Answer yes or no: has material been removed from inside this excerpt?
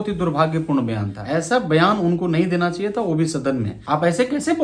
yes